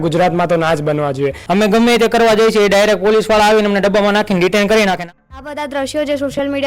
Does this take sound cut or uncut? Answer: cut